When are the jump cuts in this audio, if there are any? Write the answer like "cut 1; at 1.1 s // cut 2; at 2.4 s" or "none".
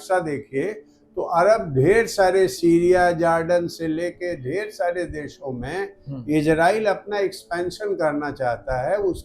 none